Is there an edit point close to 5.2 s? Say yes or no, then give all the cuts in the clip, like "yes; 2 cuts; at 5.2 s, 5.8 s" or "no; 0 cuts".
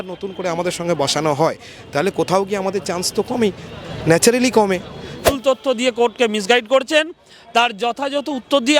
yes; 1 cut; at 5.2 s